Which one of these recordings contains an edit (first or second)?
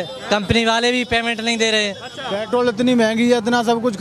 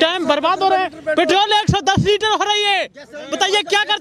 first